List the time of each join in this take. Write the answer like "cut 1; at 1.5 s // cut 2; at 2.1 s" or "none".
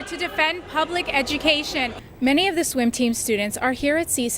cut 1; at 2.0 s